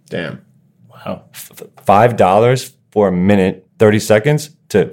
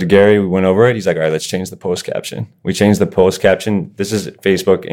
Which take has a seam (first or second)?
first